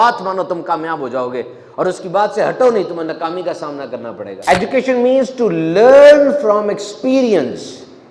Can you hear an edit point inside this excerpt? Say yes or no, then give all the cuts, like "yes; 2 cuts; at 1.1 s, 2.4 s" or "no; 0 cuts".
yes; 1 cut; at 4.3 s